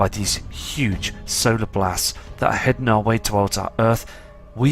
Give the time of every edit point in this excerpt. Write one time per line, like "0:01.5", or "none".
0:02.2